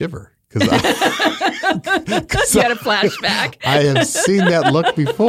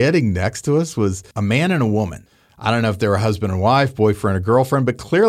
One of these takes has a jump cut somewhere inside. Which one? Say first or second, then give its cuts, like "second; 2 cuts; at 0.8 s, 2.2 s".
second; 2 cuts; at 1.3 s, 2.2 s